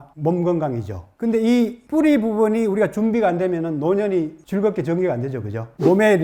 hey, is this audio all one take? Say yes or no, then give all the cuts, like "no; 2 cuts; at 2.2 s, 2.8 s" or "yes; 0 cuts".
yes; 0 cuts